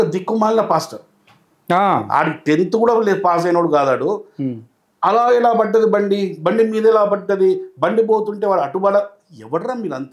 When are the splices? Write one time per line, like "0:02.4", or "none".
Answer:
none